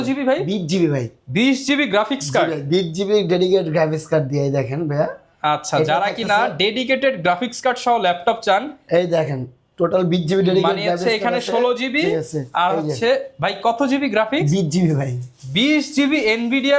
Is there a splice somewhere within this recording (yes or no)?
no